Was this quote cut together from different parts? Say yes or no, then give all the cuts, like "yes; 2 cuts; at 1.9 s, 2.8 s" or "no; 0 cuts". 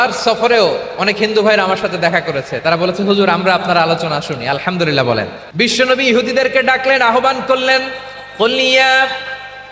yes; 1 cut; at 5.4 s